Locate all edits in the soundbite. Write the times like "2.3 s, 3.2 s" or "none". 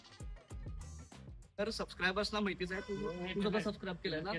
1.6 s